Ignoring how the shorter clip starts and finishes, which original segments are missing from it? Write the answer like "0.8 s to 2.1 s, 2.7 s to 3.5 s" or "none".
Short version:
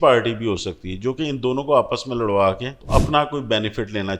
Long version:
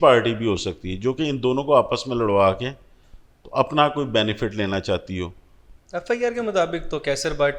2.7 s to 3.4 s